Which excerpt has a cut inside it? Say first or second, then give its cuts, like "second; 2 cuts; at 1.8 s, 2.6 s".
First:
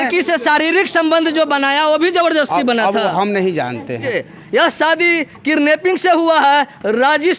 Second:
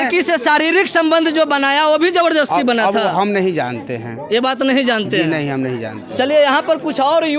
first; 1 cut; at 4.2 s